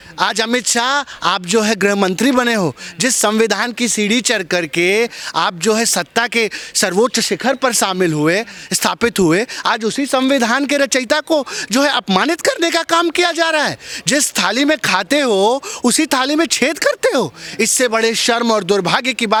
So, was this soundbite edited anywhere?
no; 0 cuts

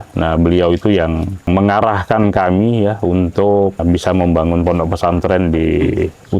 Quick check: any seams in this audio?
yes; 2 cuts; at 1.5 s, 3.8 s

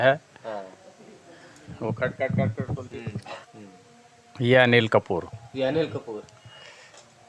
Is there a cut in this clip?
yes; 1 cut; at 3.4 s

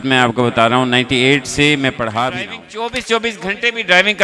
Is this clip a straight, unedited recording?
no; 1 cut; at 3.1 s

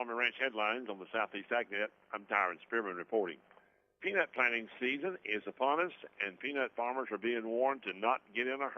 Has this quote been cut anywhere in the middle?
yes; 1 cut; at 0.9 s

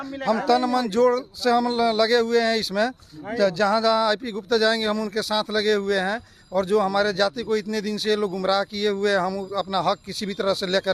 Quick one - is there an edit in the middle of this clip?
no; 0 cuts

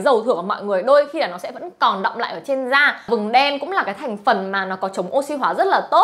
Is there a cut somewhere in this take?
yes; 1 cut; at 3.1 s

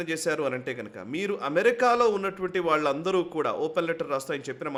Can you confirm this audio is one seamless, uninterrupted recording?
yes; 0 cuts

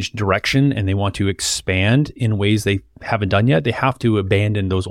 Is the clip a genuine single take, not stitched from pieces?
yes; 0 cuts

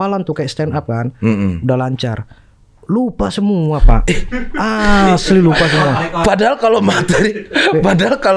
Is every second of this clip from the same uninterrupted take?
yes; 0 cuts

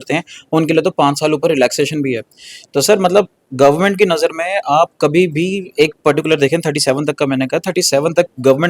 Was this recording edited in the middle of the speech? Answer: no; 0 cuts

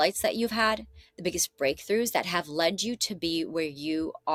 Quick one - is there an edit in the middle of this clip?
no; 0 cuts

